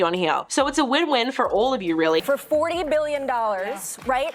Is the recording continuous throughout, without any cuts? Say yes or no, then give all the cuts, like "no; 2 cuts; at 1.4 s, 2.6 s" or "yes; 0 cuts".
no; 1 cut; at 2.2 s